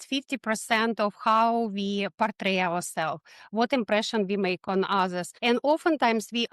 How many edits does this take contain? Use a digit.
1